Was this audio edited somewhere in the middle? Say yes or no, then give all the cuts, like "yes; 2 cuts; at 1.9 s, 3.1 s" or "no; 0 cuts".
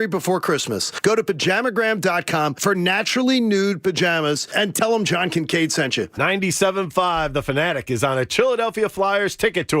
yes; 1 cut; at 6.1 s